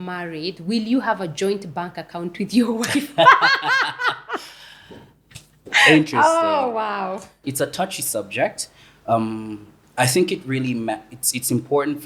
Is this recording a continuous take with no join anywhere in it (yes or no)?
no